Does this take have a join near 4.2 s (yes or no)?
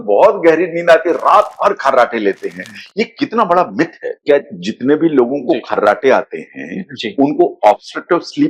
yes